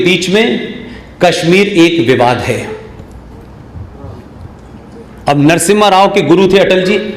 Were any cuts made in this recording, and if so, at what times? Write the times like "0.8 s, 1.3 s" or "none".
none